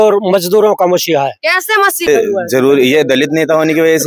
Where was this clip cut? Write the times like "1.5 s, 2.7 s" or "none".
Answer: 2.1 s